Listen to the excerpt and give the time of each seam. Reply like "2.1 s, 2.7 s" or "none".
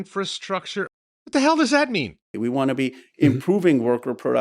0.9 s, 2.2 s